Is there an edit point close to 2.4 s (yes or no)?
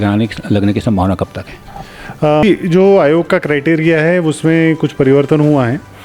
yes